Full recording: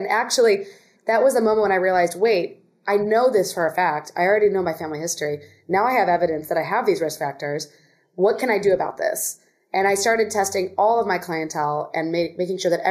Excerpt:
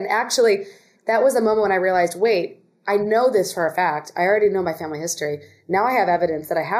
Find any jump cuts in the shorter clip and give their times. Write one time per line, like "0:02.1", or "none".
none

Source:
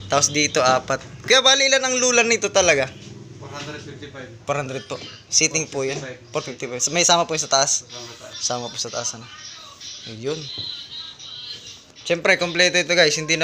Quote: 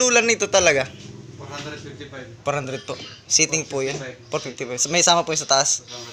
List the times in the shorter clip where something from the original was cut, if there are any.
none

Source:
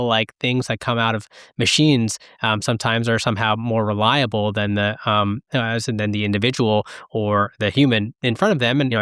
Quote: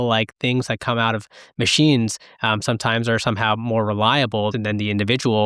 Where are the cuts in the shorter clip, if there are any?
0:04.5

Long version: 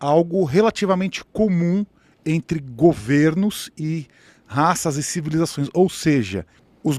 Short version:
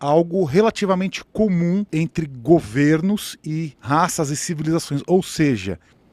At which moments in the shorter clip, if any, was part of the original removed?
0:01.9
0:03.7

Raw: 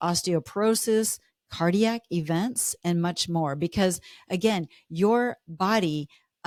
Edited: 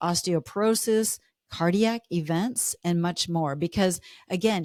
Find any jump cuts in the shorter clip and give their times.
none

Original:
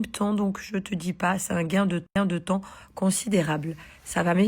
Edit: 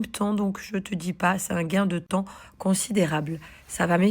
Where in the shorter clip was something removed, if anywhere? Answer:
0:02.1

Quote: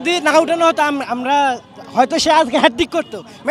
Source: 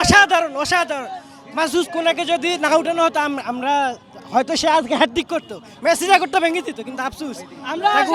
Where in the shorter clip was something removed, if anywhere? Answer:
none

